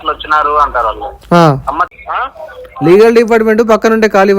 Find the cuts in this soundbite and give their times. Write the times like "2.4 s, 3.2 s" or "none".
1.8 s